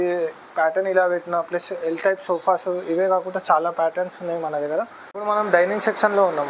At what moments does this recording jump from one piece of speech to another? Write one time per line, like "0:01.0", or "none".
0:05.5